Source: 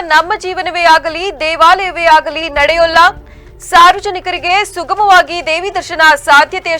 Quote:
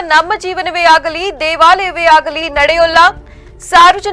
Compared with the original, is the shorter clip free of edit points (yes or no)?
yes